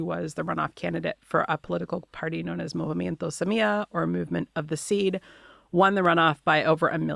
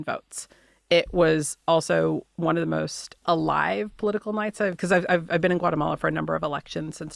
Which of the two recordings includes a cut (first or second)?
second